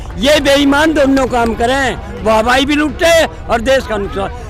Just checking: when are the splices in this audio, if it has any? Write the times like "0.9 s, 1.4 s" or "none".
none